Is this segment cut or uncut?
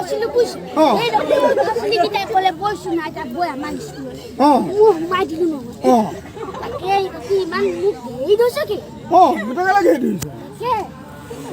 cut